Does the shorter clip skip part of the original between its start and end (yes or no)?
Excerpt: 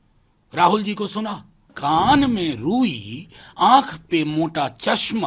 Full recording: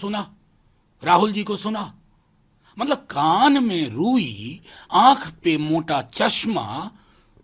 yes